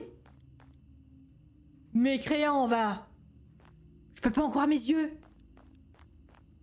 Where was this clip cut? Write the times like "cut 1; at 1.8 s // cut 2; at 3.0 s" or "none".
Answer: none